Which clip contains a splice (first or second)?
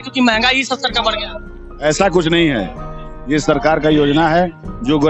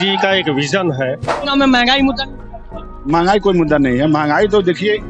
second